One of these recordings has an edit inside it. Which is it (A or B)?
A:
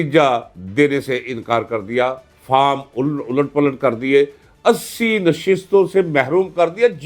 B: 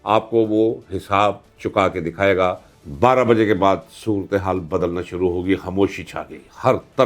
B